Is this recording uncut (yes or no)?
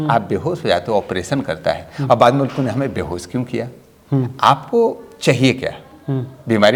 yes